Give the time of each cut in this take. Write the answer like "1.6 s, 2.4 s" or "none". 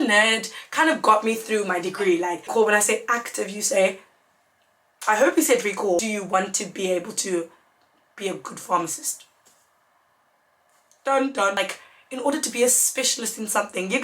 2.5 s, 6.0 s, 11.6 s

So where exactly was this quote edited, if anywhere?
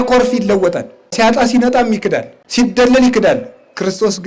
1.1 s, 2.4 s

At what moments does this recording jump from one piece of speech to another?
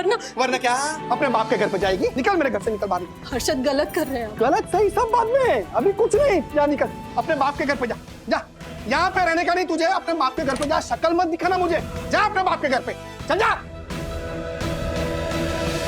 1.0 s, 2.1 s

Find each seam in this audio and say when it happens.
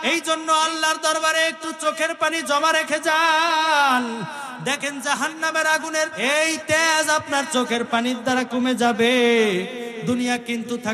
6.2 s

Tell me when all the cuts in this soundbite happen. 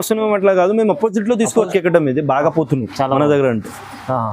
1.7 s

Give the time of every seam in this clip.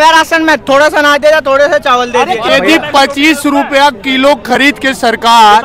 2.4 s

